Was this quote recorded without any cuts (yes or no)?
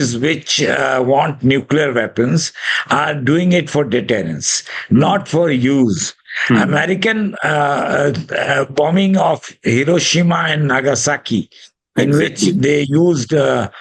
yes